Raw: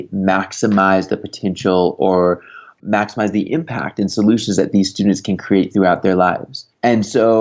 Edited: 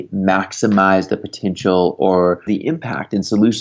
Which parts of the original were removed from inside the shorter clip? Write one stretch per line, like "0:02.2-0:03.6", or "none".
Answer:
0:02.5-0:03.3